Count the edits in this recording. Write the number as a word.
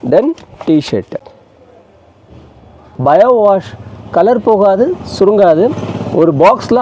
two